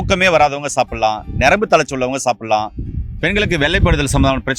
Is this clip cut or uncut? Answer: uncut